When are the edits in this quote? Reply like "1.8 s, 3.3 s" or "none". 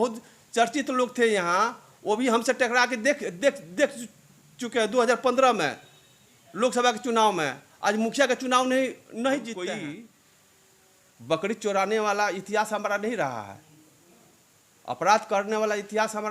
9.6 s